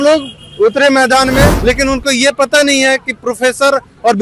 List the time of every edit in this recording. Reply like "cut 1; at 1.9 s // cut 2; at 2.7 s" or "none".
cut 1; at 1.6 s